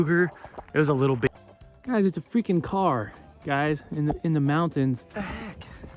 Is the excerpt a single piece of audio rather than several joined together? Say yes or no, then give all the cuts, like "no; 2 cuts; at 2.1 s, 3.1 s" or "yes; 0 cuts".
no; 2 cuts; at 1.3 s, 5.1 s